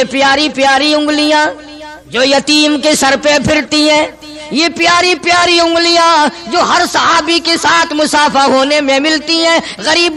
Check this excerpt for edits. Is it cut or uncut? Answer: uncut